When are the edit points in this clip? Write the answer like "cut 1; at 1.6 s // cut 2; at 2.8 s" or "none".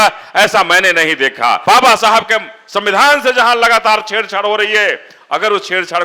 cut 1; at 1.6 s